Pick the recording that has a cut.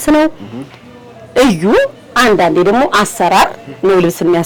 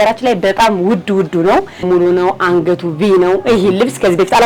second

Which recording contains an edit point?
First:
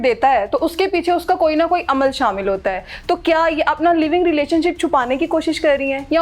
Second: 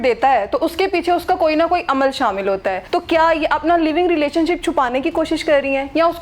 second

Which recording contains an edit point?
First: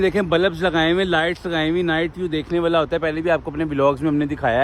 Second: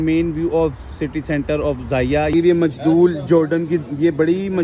second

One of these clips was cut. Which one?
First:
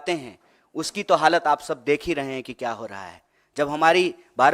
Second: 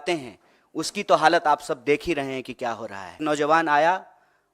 second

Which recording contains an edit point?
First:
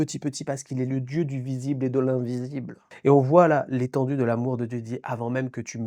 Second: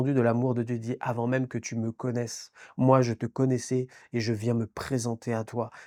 first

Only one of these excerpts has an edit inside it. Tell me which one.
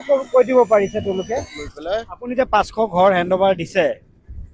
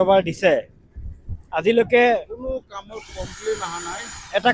first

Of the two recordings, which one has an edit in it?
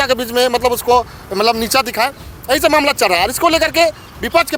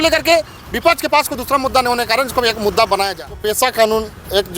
second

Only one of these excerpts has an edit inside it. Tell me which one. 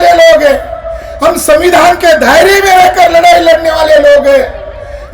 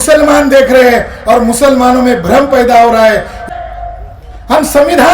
second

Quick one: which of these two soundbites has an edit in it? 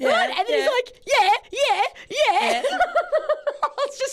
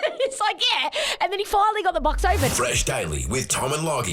second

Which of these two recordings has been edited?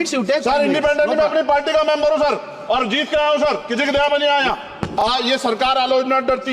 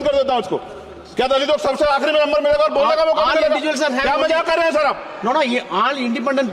first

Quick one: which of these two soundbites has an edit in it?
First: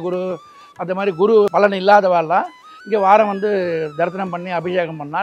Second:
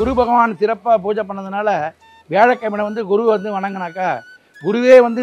first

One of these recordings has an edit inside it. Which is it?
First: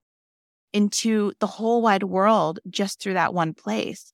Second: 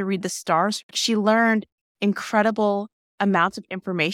second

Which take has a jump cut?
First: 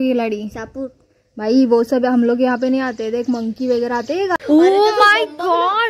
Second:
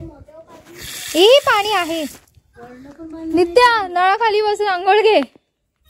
first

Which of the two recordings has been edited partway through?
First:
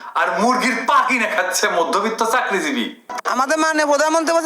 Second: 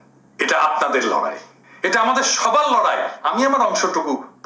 first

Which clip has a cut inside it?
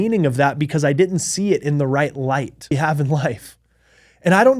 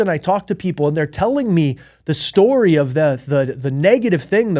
first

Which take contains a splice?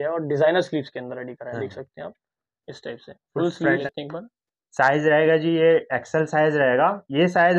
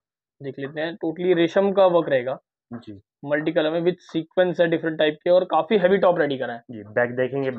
first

